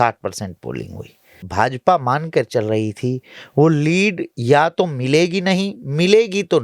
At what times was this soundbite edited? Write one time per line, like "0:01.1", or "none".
0:01.4